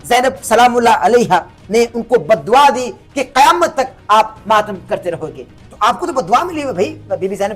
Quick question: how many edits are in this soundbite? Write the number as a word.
zero